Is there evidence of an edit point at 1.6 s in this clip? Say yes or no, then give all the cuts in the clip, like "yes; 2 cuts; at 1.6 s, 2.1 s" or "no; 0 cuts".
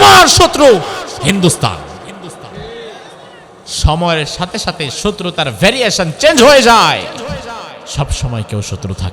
no; 2 cuts; at 3.7 s, 7.9 s